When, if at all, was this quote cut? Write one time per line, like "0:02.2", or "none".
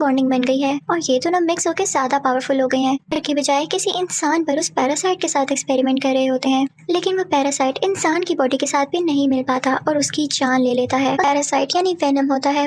0:03.1
0:11.2